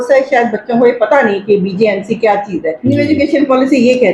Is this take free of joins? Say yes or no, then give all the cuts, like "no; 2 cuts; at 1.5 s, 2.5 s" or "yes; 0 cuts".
no; 1 cut; at 2.8 s